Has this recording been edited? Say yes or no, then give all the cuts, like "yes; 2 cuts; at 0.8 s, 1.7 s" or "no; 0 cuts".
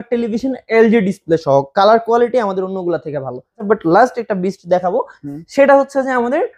yes; 1 cut; at 3.6 s